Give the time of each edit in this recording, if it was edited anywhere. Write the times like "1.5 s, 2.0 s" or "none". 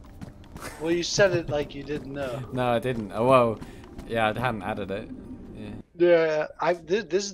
5.8 s